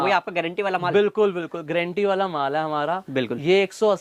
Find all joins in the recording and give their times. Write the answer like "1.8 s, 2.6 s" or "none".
none